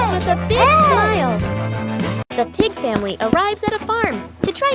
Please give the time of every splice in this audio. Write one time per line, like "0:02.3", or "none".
0:02.2

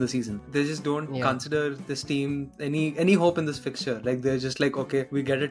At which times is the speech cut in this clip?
none

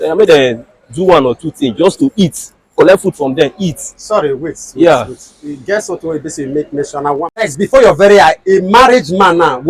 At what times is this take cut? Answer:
0:07.5

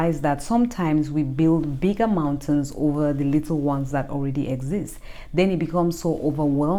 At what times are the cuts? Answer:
none

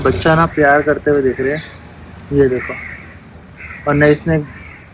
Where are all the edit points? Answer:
none

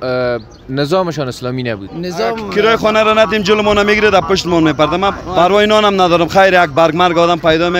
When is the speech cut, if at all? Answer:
0:02.4
0:05.2

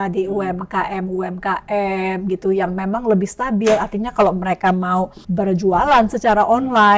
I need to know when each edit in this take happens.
0:05.2

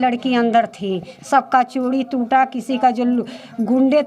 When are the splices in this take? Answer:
none

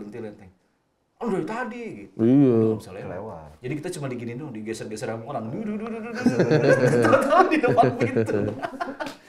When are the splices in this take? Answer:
none

